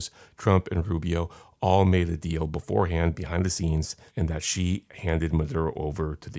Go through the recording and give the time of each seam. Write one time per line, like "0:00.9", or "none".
0:04.0
0:04.9

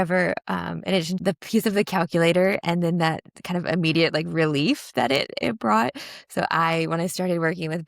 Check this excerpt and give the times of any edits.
0:01.2

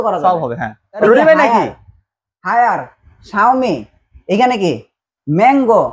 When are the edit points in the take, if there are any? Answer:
0:01.0

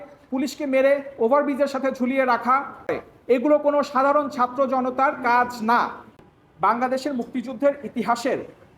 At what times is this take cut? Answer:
0:03.0
0:06.1

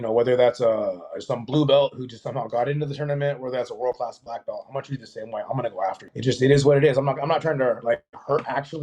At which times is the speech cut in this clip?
0:06.1

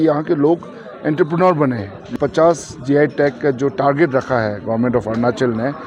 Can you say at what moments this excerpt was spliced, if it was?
0:02.1

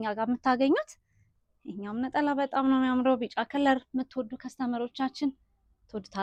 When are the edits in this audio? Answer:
none

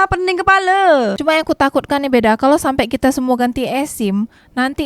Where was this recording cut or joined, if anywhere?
0:01.1

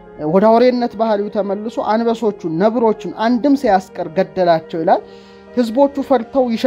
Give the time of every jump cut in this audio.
none

